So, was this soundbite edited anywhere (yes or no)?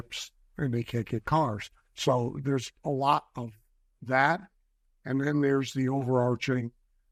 no